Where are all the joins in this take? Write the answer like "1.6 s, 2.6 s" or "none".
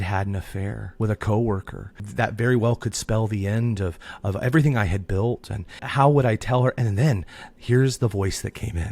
0.8 s, 2.0 s, 5.8 s